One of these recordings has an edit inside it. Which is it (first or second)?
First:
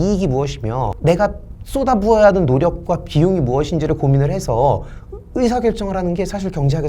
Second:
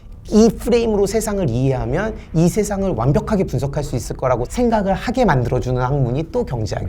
first